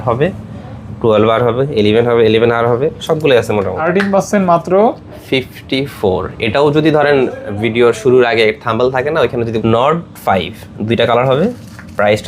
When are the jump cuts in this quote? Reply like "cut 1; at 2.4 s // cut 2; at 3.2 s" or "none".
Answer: cut 1; at 3.8 s // cut 2; at 9.6 s